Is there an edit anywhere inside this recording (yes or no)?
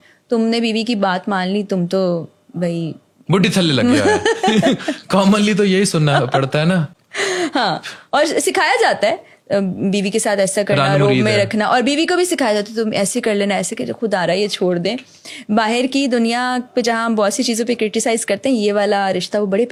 no